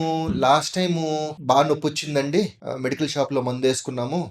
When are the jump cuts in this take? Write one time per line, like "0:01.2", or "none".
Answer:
0:01.3
0:02.6

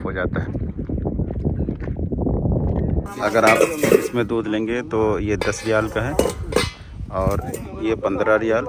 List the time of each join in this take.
0:03.1

